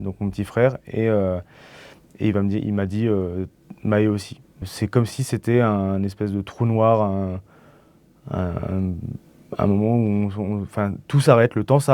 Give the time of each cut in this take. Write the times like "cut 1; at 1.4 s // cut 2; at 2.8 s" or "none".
cut 1; at 4.6 s